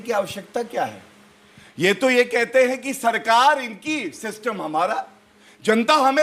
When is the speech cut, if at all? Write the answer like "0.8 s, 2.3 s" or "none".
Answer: none